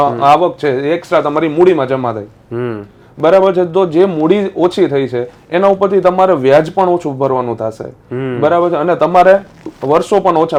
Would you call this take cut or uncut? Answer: uncut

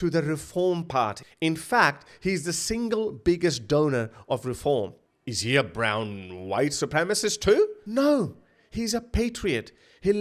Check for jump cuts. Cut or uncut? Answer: uncut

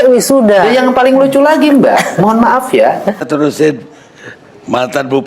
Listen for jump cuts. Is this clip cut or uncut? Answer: cut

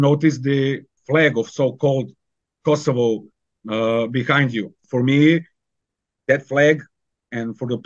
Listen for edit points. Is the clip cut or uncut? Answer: cut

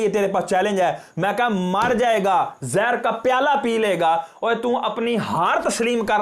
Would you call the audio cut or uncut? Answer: uncut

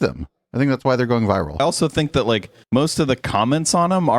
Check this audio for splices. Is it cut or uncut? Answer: cut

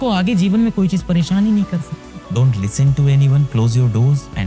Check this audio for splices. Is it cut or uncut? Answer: cut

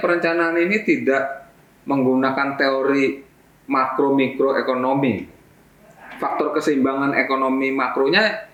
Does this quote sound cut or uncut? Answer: uncut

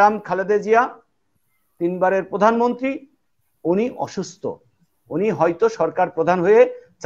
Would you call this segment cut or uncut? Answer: uncut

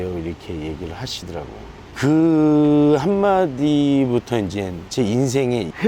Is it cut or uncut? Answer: uncut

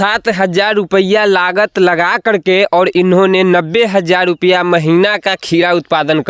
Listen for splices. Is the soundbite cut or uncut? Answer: uncut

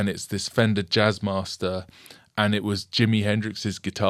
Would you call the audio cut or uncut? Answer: uncut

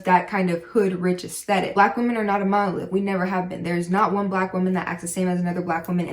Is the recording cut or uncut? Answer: cut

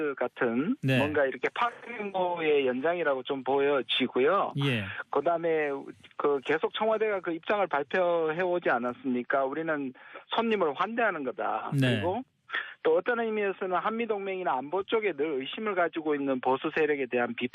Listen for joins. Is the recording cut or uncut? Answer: cut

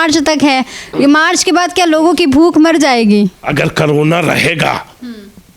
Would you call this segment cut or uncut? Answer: uncut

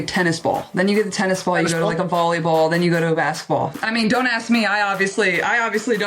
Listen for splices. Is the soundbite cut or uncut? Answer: cut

